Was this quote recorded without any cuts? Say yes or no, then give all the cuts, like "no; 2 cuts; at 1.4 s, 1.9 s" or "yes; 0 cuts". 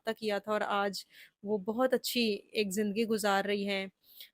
yes; 0 cuts